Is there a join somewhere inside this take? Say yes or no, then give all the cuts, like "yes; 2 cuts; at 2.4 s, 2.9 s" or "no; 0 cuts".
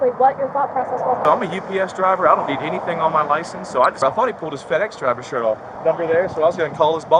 yes; 3 cuts; at 1.2 s, 4.0 s, 5.7 s